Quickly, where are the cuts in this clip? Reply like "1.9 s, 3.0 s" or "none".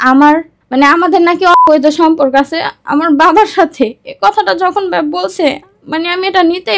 5.7 s